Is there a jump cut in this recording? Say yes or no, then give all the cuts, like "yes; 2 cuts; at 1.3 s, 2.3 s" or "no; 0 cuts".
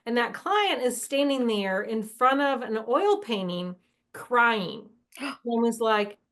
no; 0 cuts